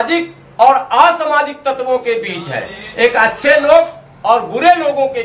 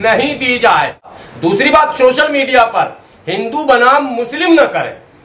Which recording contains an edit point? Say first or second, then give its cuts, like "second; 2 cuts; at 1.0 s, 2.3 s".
second; 1 cut; at 1.2 s